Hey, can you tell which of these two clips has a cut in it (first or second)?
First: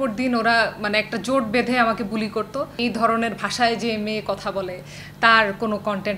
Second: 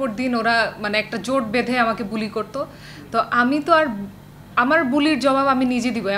first